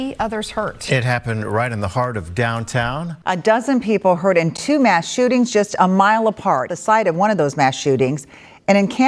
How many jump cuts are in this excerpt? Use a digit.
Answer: 2